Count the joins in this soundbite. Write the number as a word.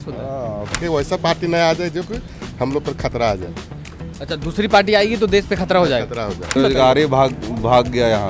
two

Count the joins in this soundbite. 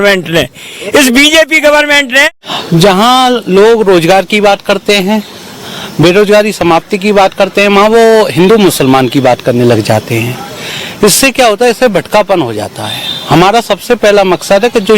one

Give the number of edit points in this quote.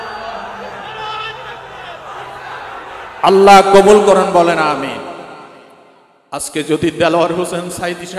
one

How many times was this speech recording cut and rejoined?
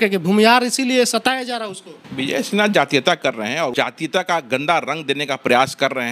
one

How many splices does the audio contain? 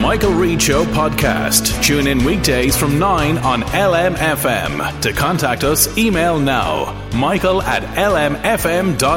zero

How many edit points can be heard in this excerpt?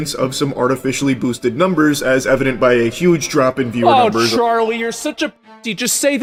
zero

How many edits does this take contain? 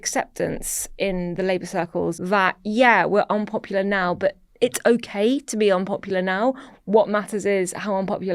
one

